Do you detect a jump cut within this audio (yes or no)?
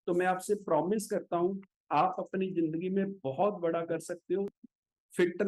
yes